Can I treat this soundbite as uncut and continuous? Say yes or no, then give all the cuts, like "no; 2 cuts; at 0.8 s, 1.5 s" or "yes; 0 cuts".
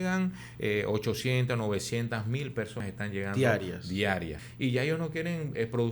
no; 2 cuts; at 2.8 s, 4.4 s